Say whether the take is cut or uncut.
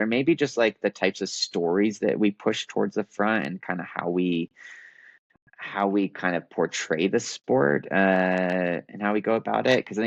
uncut